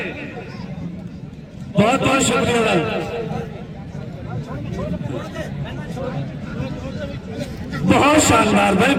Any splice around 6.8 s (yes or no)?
no